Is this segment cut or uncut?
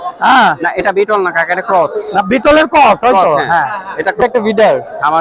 cut